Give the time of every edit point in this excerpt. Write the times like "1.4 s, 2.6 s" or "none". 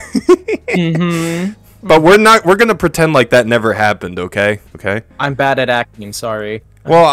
4.7 s